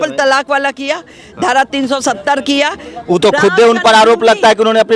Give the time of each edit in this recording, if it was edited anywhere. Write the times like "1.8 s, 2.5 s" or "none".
none